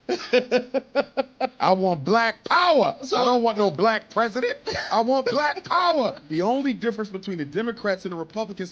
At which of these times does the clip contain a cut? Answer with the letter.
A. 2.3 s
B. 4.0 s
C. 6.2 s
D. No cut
C